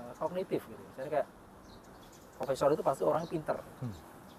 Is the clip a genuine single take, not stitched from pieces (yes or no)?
yes